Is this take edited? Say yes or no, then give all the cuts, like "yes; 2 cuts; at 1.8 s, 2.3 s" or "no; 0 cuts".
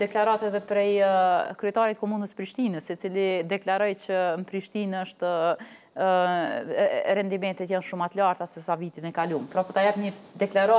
no; 0 cuts